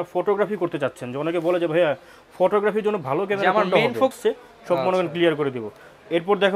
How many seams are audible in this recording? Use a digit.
1